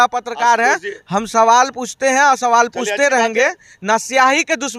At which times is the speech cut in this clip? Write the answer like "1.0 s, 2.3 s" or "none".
none